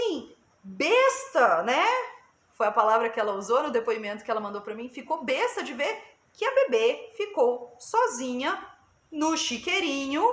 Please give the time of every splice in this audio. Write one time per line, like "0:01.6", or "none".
none